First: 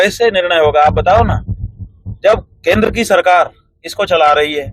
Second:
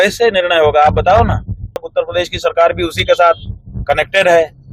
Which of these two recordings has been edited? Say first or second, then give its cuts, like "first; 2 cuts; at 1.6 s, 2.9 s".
second; 1 cut; at 1.9 s